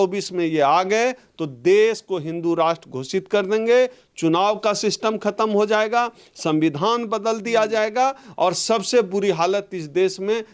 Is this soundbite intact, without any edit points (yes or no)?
yes